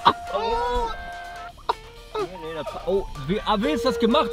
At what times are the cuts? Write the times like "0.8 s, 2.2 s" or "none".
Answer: 1.0 s